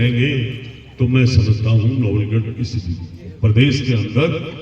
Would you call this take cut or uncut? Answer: uncut